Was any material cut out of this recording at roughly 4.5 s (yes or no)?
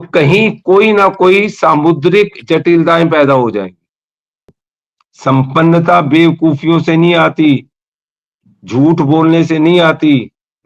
yes